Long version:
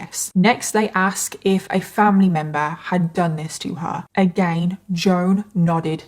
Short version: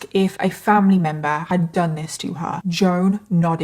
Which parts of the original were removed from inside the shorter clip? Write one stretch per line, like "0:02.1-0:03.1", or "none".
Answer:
0:02.7-0:02.8
0:04.0-0:04.9